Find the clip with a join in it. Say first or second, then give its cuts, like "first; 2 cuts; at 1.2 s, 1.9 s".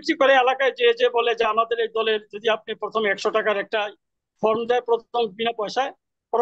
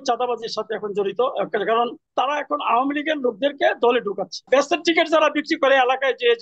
second; 2 cuts; at 2.0 s, 4.5 s